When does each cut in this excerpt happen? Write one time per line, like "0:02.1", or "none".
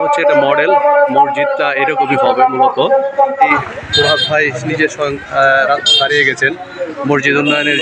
0:03.5